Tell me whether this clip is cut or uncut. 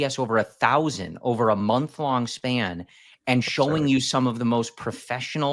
uncut